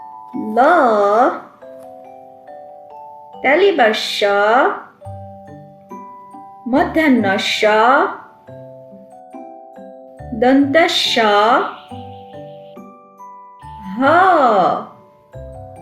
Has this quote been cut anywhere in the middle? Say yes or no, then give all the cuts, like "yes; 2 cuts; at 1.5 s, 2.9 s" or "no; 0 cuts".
yes; 3 cuts; at 12.0 s, 13.8 s, 15.0 s